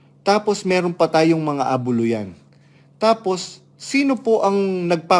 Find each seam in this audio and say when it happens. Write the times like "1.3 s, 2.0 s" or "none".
none